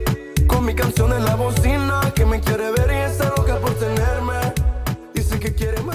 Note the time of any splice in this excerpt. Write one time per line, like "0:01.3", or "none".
none